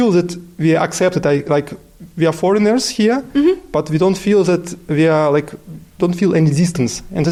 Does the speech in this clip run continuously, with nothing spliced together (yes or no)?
yes